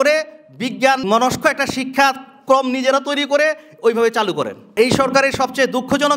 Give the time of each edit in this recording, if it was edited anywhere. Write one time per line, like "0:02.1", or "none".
0:01.0
0:04.7